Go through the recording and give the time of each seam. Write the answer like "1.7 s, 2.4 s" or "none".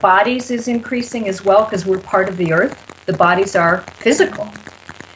2.9 s